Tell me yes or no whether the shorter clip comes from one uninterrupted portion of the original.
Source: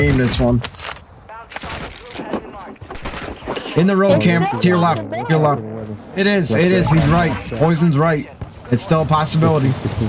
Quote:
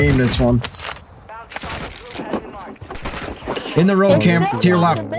yes